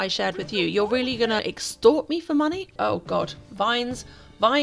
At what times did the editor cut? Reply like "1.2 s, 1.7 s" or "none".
1.4 s, 2.7 s